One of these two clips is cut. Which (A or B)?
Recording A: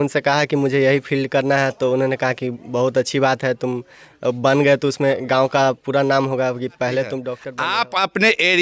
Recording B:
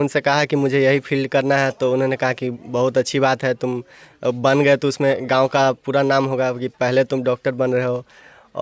A